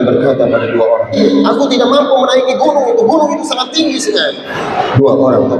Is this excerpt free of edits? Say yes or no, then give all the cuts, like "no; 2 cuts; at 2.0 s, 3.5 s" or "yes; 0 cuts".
no; 2 cuts; at 1.1 s, 4.5 s